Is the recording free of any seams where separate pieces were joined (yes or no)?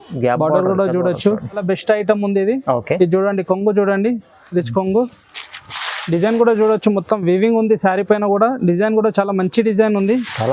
no